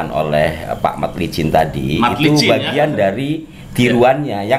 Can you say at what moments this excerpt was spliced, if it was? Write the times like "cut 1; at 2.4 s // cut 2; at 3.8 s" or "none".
none